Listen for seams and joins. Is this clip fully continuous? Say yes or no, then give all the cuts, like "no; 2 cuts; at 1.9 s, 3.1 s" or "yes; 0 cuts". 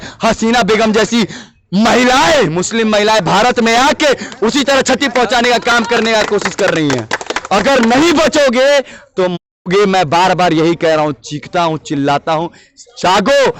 yes; 0 cuts